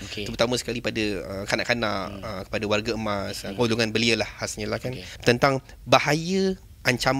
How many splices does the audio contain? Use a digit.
1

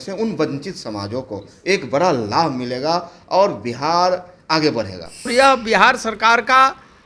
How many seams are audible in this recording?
1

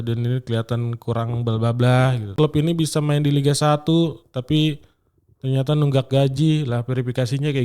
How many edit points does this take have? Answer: 1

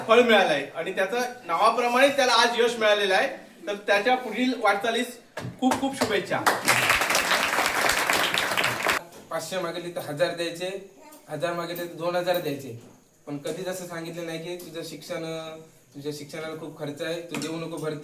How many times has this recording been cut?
1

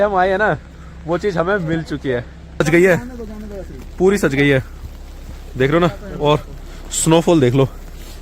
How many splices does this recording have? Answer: 1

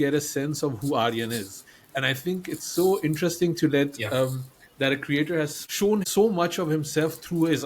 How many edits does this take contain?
1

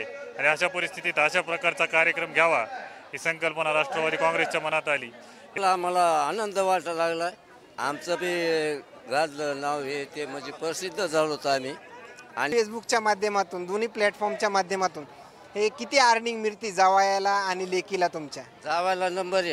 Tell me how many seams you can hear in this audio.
2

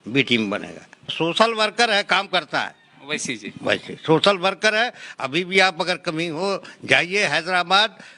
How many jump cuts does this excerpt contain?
1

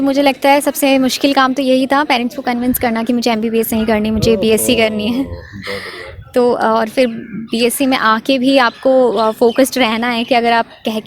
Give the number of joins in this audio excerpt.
0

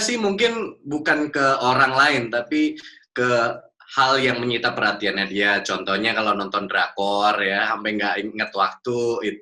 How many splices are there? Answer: 0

